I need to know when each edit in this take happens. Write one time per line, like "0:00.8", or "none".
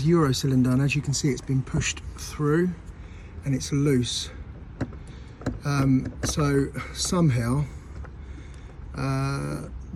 none